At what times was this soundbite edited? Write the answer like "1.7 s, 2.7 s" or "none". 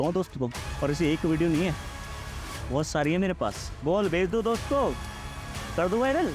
none